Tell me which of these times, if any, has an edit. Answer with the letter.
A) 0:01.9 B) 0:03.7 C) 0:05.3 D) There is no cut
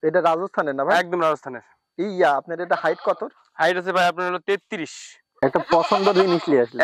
C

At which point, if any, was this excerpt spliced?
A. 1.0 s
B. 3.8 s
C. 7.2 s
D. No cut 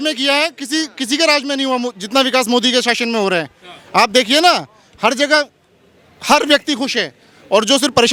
D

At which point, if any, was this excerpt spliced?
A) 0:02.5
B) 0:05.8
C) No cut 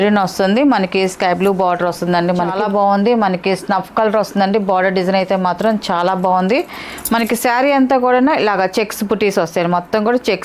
A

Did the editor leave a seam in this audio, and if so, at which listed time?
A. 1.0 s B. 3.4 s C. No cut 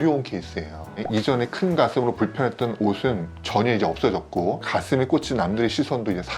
A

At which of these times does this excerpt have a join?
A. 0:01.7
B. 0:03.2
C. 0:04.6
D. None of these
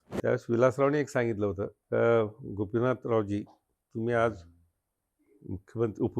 A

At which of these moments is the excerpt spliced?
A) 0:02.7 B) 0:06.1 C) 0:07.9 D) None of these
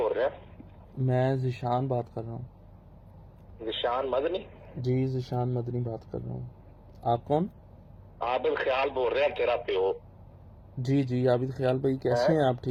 D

